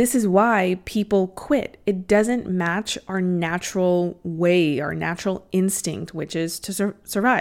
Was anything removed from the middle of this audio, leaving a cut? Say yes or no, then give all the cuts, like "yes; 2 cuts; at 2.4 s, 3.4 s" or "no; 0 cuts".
no; 0 cuts